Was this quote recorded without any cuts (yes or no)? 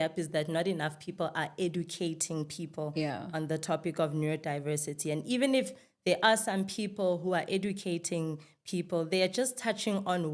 yes